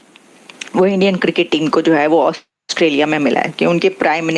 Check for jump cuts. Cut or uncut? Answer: uncut